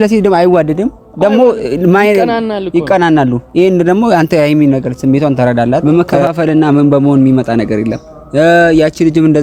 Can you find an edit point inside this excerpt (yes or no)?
yes